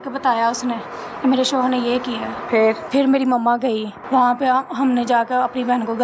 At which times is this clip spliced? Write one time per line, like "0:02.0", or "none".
0:02.8
0:03.9